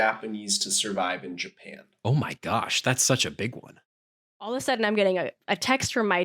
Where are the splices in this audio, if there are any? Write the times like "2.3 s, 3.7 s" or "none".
4.0 s